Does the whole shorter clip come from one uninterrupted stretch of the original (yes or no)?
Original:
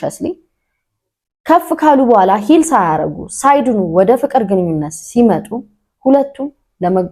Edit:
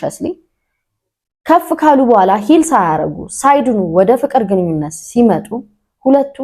yes